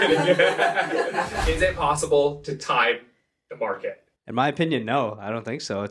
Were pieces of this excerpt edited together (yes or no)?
yes